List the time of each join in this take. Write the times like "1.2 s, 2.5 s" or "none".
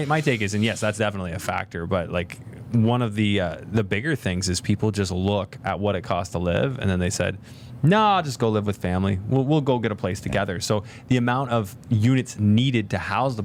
none